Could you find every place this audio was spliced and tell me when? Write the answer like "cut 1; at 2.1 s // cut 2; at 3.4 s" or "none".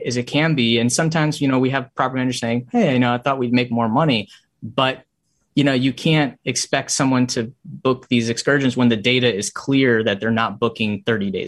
none

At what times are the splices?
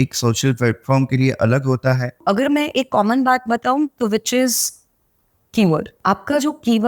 cut 1; at 2.2 s // cut 2; at 5.9 s

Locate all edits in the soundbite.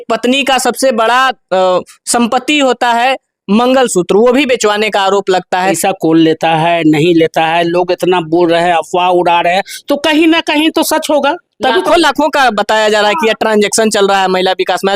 cut 1; at 5.8 s

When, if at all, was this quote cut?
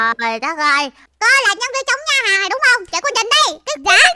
none

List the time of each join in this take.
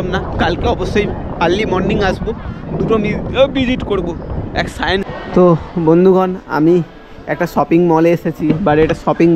cut 1; at 5.1 s

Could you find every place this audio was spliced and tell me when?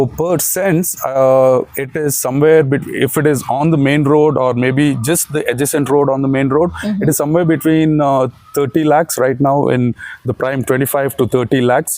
none

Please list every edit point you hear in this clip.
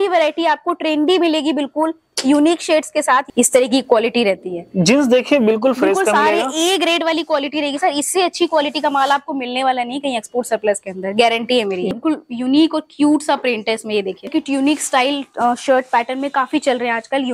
cut 1; at 3.3 s // cut 2; at 11.9 s // cut 3; at 14.3 s

